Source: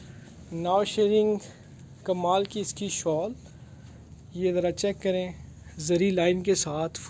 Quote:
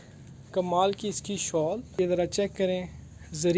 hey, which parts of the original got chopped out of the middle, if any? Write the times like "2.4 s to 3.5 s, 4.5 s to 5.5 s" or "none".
3.4 s to 4.3 s